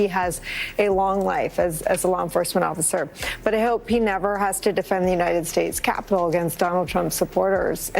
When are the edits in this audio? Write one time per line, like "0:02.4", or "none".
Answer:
none